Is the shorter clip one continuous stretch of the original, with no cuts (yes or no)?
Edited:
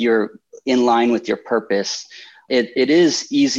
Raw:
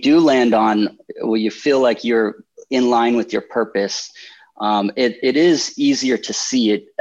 no